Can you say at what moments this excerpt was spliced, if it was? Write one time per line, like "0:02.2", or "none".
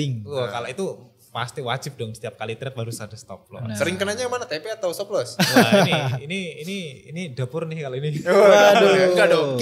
none